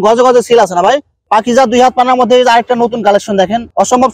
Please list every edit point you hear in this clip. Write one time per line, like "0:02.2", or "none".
0:01.1